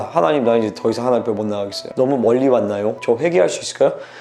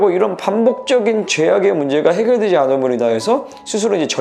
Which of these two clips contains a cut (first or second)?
first